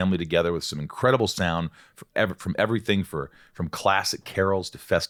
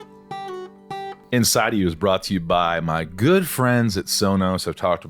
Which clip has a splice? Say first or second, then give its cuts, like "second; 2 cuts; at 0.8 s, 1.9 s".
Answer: second; 1 cut; at 1.1 s